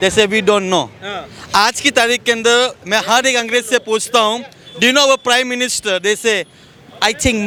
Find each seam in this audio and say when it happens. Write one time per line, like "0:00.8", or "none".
none